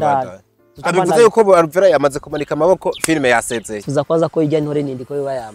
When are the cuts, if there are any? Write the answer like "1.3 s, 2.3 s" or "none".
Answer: 3.9 s